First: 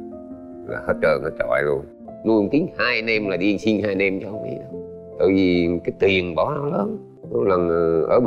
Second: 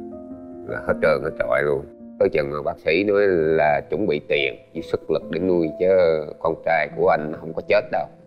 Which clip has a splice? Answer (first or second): first